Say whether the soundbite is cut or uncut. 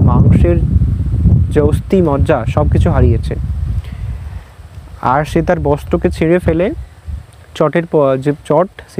uncut